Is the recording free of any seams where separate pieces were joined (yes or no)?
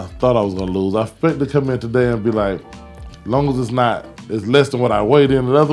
yes